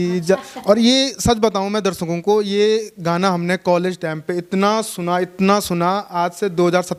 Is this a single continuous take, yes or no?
yes